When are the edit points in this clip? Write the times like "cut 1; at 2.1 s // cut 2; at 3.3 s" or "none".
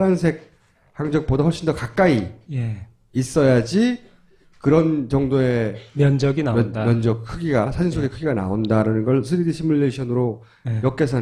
cut 1; at 6.4 s